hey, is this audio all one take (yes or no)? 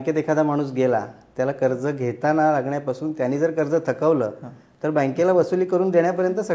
yes